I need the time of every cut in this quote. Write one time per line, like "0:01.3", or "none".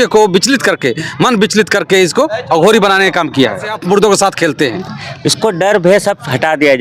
0:03.7